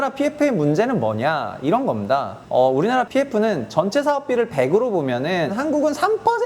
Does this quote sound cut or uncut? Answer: cut